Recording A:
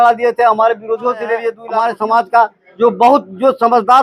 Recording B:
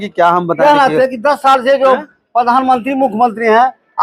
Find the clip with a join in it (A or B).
A